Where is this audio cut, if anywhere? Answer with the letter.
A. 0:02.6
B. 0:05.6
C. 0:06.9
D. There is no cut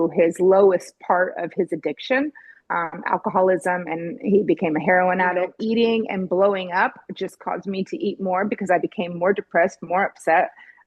B